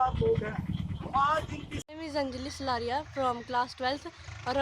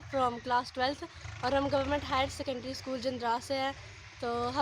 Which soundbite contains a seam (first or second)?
first